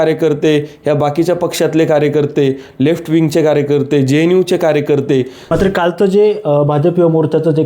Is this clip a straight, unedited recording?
no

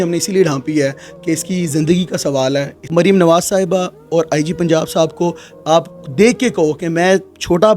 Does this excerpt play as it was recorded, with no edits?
no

